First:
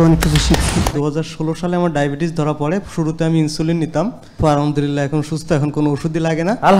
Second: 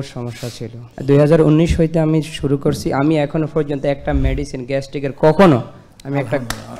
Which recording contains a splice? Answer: first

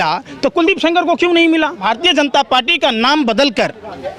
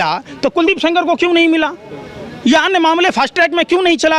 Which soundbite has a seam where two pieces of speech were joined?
first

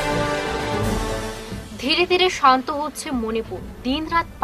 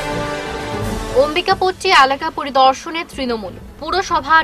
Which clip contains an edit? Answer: second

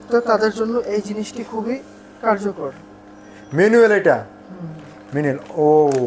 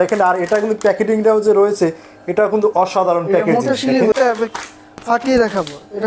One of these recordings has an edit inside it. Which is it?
second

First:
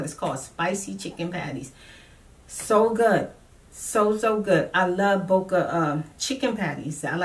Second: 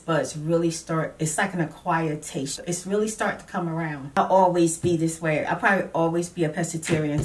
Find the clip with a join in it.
second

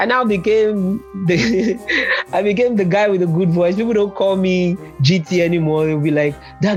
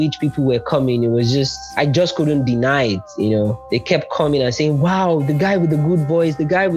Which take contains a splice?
second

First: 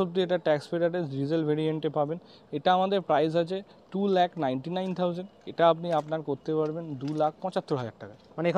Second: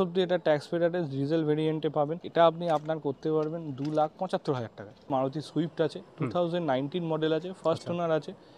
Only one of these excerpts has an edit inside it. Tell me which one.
second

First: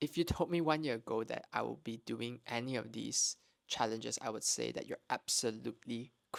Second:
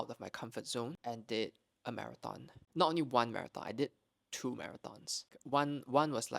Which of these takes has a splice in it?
second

